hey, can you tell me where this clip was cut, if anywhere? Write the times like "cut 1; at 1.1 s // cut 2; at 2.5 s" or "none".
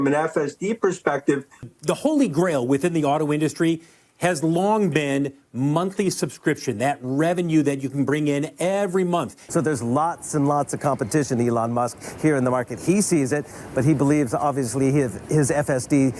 cut 1; at 1.7 s // cut 2; at 9.4 s